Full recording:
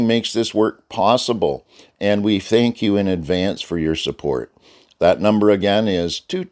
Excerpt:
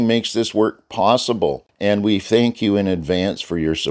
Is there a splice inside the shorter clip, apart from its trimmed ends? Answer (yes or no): yes